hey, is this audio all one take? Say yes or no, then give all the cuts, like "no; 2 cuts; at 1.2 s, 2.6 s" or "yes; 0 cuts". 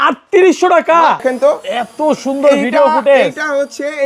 no; 1 cut; at 1.2 s